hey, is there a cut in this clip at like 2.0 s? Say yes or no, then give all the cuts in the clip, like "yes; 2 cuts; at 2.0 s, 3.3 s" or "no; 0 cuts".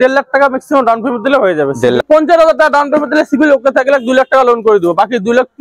yes; 1 cut; at 2.0 s